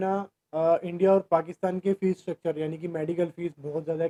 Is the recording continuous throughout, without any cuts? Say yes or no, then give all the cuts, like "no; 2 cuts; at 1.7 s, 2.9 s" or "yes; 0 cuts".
yes; 0 cuts